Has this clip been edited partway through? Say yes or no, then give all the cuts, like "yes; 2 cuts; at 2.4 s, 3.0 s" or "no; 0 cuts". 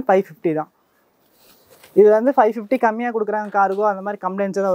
no; 0 cuts